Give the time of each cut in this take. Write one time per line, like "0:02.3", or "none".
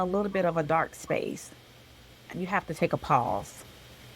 0:02.3